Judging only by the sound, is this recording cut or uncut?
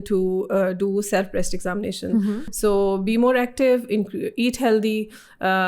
cut